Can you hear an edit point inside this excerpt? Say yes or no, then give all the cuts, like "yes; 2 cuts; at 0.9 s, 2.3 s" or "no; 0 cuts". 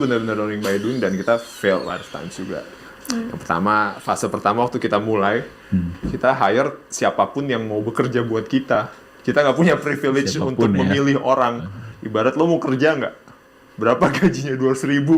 no; 0 cuts